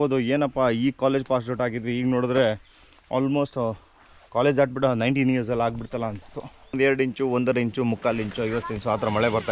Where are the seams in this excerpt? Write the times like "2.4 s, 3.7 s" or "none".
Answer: 6.8 s